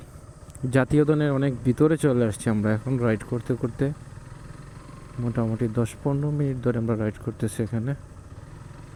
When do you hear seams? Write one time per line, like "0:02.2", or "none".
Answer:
none